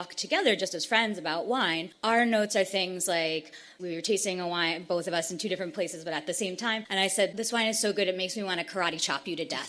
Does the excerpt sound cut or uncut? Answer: uncut